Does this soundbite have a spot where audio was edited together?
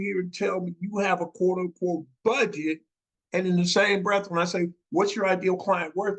no; 0 cuts

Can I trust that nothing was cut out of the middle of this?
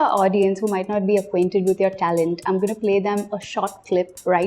yes; 0 cuts

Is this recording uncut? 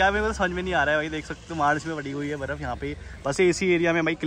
yes; 0 cuts

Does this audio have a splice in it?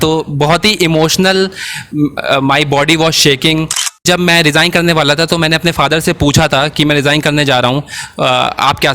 yes; 1 cut; at 4.0 s

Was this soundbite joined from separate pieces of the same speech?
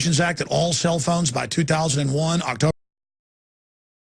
no; 0 cuts

